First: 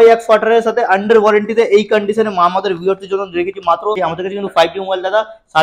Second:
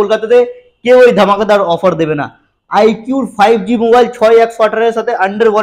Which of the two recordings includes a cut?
first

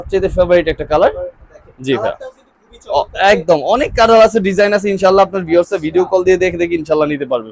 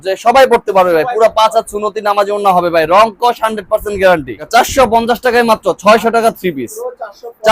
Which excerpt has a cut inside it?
second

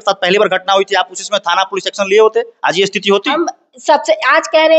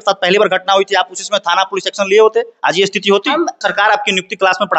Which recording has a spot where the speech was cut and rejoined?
second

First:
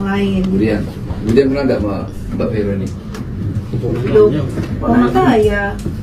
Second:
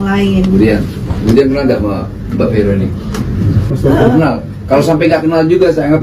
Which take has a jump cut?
second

